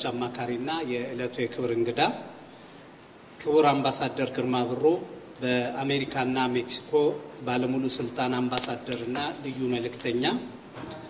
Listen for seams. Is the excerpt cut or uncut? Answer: uncut